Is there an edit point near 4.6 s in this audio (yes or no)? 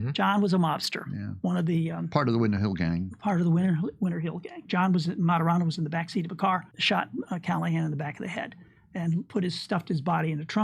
yes